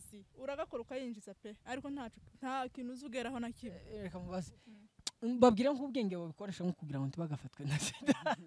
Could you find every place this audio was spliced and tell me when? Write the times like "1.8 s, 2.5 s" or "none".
3.9 s